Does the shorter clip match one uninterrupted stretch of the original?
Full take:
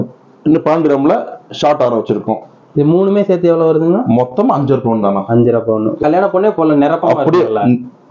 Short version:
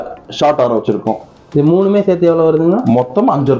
yes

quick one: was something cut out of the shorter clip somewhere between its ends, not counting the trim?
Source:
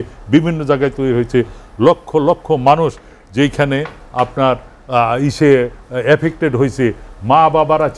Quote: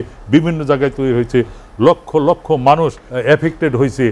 yes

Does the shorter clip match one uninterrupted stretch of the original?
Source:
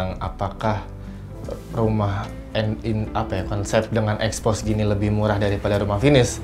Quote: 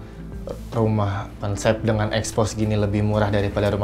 no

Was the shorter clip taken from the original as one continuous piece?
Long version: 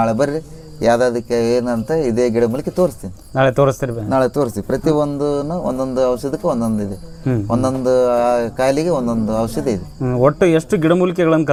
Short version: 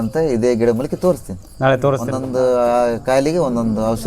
no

